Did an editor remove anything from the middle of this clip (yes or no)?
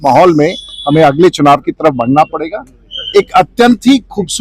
no